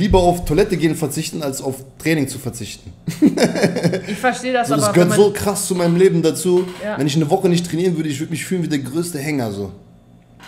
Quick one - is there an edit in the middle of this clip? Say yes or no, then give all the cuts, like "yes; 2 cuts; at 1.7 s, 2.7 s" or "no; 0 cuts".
no; 0 cuts